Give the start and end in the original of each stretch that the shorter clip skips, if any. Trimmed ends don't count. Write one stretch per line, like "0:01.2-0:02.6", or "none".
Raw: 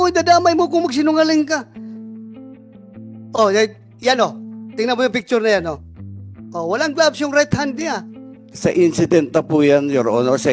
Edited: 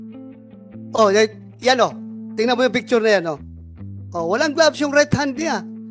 0:03.1-0:03.3